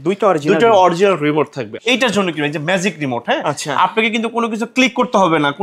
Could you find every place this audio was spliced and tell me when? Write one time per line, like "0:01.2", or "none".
0:01.7